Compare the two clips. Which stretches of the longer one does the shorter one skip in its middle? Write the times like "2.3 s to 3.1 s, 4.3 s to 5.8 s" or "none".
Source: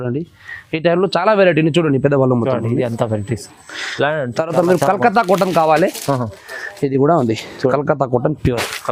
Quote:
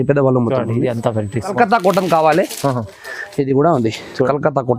3.5 s to 5.0 s

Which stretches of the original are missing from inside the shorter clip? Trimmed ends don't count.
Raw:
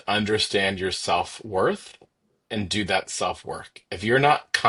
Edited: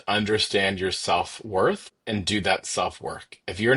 1.9 s to 2.4 s

